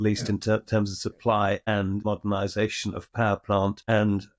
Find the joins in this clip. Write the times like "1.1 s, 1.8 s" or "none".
2.0 s